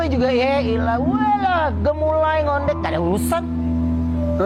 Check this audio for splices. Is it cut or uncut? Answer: uncut